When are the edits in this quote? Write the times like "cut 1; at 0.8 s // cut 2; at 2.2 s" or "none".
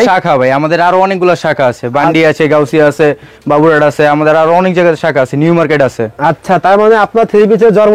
none